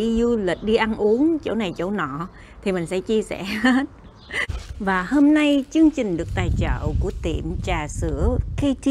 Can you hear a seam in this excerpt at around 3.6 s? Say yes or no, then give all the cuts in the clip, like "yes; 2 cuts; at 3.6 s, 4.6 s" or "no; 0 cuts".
no; 1 cut; at 4.9 s